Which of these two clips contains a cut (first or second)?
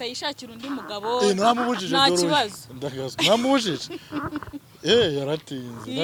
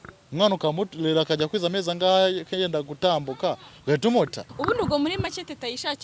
second